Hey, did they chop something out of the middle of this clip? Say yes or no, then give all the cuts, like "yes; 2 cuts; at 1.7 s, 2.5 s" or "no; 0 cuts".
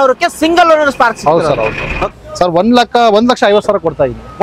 yes; 1 cut; at 2.2 s